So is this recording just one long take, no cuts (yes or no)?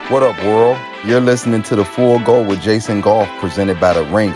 no